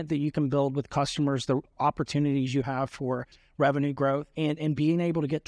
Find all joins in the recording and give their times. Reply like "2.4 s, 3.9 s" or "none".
4.3 s

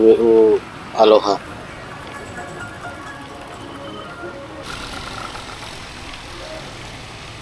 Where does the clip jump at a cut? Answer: 4.6 s

